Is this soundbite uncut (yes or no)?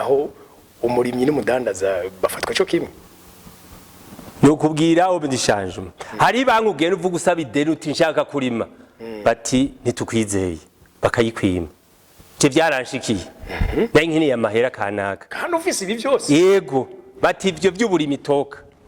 yes